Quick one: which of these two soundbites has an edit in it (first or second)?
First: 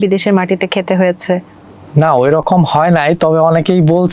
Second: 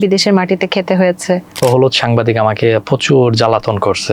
second